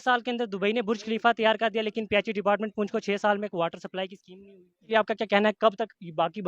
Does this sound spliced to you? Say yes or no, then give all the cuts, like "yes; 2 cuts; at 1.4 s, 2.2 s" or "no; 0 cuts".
yes; 1 cut; at 4.9 s